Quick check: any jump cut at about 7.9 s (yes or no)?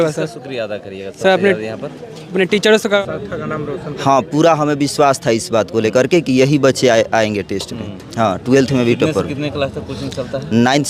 no